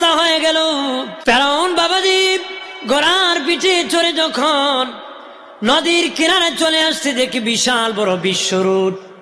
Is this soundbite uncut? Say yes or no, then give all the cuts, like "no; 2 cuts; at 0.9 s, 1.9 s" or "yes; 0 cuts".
no; 1 cut; at 1.1 s